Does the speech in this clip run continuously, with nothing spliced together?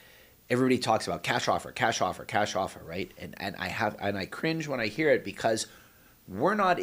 yes; 0 cuts

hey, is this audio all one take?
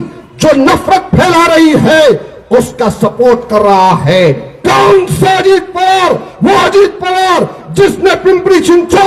yes; 0 cuts

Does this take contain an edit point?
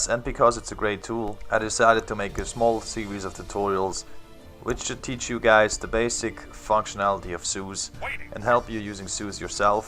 yes; 1 cut; at 4.5 s

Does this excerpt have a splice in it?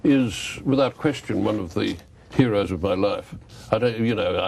yes; 1 cut; at 1.5 s

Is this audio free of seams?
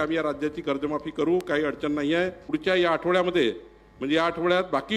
no; 1 cut; at 2.5 s

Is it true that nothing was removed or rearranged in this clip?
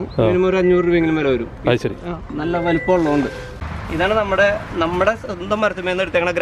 no; 1 cut; at 3.4 s

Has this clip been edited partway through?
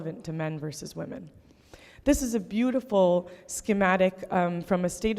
no; 0 cuts

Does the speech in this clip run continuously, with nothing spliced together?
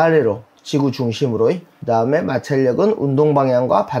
no; 1 cut; at 1.7 s

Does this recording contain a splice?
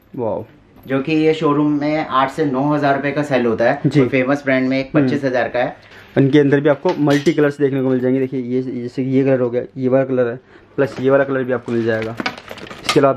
yes; 1 cut; at 5.8 s

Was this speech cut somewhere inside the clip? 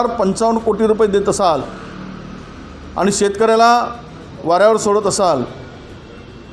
no; 0 cuts

